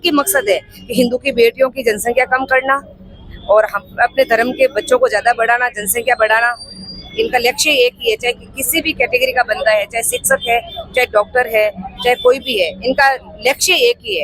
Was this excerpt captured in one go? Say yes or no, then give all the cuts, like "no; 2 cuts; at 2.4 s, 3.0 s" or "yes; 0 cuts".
yes; 0 cuts